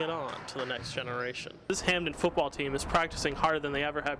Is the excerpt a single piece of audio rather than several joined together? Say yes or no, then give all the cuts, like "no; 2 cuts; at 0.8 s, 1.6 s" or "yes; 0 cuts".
no; 1 cut; at 1.7 s